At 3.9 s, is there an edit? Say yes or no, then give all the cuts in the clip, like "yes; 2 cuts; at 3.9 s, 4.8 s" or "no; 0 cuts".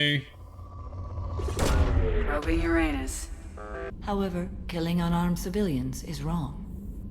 yes; 1 cut; at 3.9 s